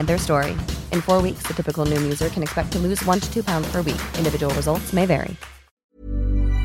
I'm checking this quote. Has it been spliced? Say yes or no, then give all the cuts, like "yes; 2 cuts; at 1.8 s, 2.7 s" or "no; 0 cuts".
yes; 1 cut; at 5.7 s